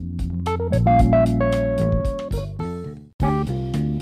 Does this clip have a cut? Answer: yes; 1 cut; at 3.0 s

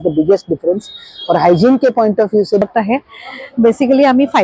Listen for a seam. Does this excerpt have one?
yes; 1 cut; at 2.6 s

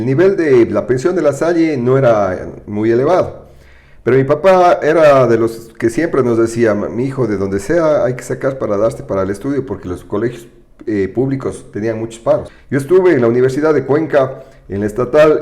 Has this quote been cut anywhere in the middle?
yes; 1 cut; at 12.6 s

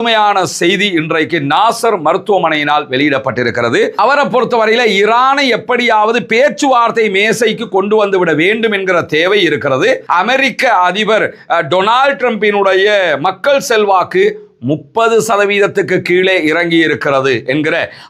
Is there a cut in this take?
yes; 2 cuts; at 3.9 s, 10.0 s

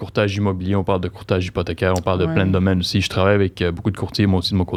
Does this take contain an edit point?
no; 0 cuts

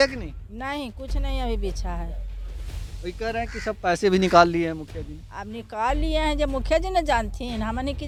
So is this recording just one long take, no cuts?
yes; 0 cuts

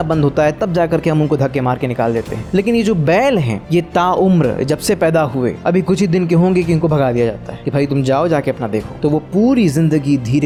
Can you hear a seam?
no; 0 cuts

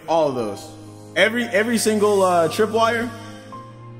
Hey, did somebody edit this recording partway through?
yes; 1 cut; at 2.9 s

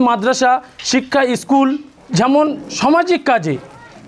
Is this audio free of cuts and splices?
no; 2 cuts; at 1.9 s, 2.7 s

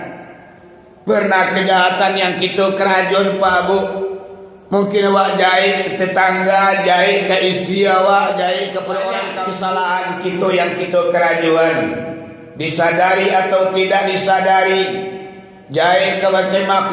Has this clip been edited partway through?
yes; 1 cut; at 9.4 s

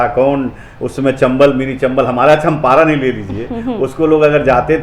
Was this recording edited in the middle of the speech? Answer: no; 0 cuts

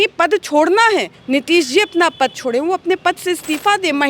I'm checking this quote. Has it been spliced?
yes; 1 cut; at 1.2 s

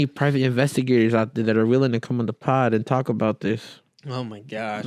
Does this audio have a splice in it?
no; 0 cuts

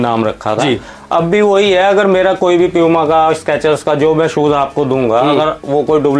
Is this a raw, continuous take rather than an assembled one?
yes; 0 cuts

